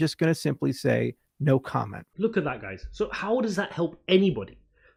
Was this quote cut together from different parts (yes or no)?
no